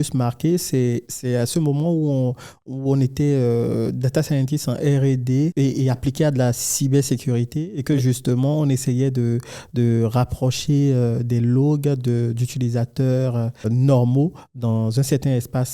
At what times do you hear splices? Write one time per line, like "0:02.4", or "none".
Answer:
0:05.5
0:13.7